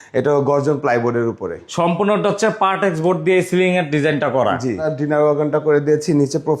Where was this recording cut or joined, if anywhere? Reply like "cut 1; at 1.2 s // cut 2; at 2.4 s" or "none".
cut 1; at 1.7 s // cut 2; at 4.9 s